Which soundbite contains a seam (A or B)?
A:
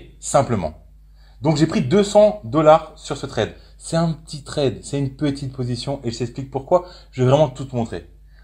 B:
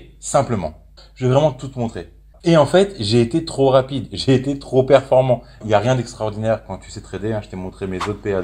B